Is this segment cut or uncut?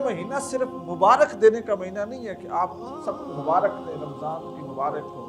uncut